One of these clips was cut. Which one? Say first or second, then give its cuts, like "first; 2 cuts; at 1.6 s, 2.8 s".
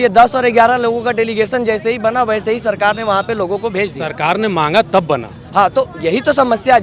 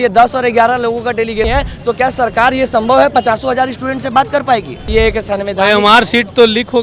second; 2 cuts; at 1.5 s, 4.9 s